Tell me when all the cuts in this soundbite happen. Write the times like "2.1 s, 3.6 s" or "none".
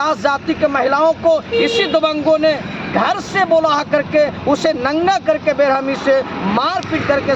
none